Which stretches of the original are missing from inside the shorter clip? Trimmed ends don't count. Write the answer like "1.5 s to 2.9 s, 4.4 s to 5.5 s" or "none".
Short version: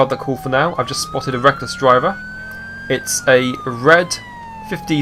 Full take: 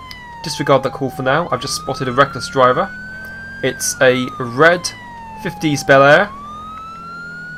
none